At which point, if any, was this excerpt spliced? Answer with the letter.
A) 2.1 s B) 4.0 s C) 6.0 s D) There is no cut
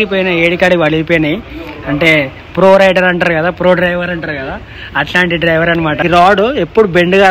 C